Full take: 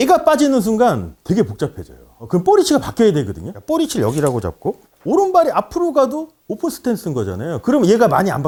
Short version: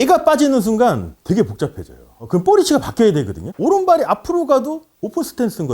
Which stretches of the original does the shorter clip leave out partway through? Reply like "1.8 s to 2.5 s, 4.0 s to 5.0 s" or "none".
3.4 s to 4.9 s